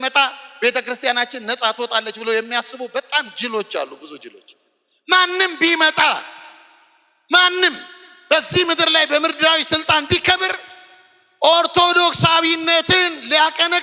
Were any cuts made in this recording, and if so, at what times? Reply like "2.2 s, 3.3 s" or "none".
none